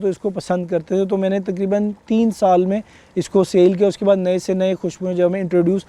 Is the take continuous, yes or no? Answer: yes